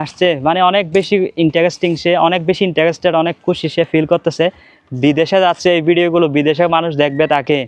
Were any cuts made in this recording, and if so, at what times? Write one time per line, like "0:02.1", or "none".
none